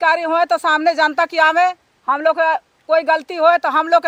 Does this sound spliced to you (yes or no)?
no